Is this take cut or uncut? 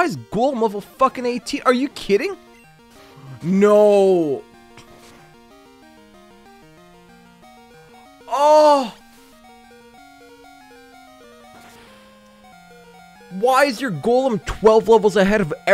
uncut